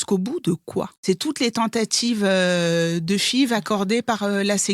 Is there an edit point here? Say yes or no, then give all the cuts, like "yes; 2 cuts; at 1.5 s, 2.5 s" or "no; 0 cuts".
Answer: yes; 1 cut; at 1.0 s